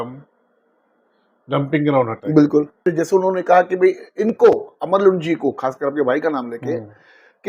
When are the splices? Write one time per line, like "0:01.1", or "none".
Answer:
0:02.8

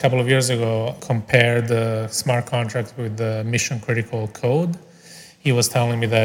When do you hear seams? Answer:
0:01.0

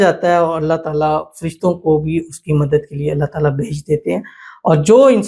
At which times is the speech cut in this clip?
none

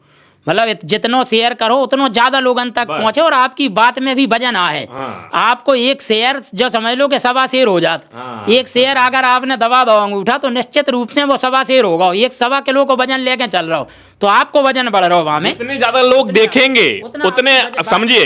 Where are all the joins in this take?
none

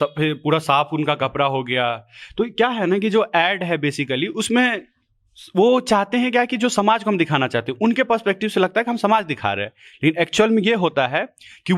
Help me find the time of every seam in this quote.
none

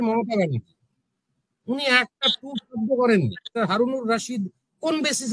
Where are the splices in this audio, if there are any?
0:03.5

